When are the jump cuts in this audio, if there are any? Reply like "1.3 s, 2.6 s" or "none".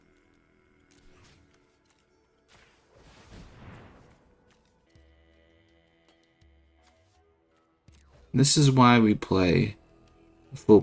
4.9 s